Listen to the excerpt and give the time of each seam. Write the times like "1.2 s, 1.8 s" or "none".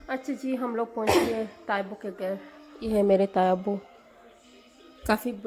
none